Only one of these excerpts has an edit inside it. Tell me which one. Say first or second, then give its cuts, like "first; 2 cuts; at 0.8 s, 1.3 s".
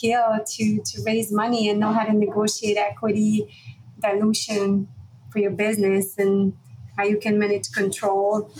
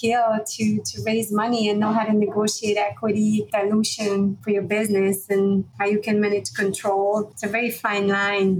second; 4 cuts; at 3.5 s, 4.4 s, 5.7 s, 7.4 s